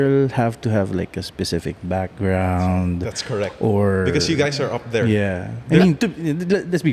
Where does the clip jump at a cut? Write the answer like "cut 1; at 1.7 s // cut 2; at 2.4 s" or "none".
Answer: none